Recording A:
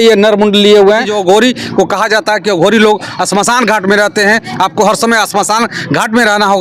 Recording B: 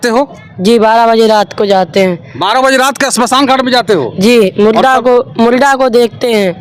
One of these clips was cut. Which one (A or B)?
A